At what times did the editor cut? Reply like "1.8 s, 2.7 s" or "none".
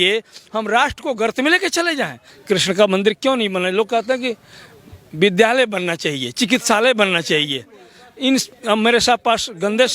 2.3 s